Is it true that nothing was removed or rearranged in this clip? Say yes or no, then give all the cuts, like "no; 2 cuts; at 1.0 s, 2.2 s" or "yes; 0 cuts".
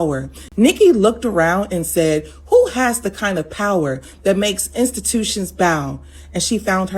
yes; 0 cuts